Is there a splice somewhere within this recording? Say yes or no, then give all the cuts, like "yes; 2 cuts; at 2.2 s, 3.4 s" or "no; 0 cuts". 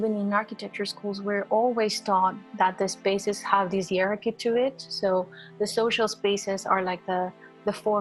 no; 0 cuts